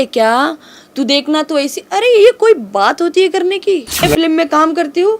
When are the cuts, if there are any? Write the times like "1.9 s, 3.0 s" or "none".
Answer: 4.0 s

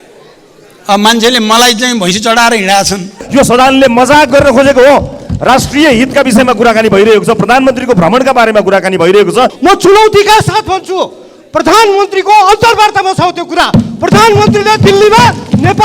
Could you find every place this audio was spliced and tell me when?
3.2 s, 9.5 s

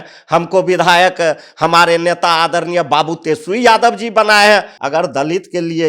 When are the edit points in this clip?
4.7 s

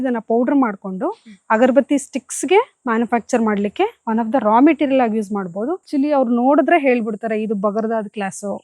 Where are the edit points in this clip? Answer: 5.8 s

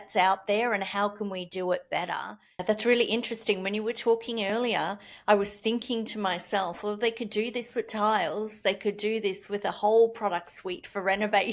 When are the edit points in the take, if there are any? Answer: 2.6 s

